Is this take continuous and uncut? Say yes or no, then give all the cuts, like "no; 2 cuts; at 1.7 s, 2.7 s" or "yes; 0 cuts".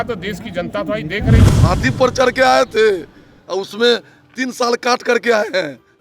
no; 1 cut; at 1.4 s